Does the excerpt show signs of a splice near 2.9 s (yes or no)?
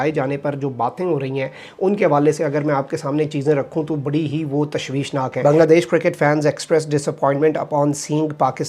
no